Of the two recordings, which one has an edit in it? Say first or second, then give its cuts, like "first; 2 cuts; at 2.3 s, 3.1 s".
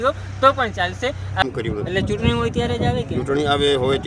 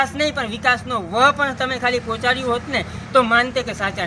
first; 1 cut; at 1.4 s